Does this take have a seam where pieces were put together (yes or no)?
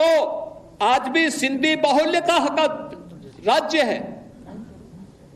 no